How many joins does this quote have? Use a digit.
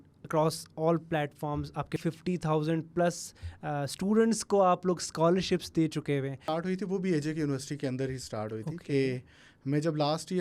2